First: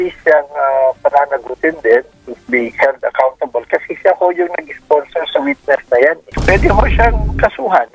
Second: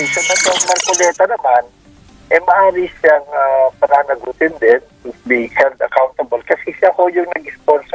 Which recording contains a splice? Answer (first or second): first